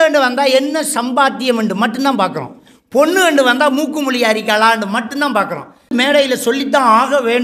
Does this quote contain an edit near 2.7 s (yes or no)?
no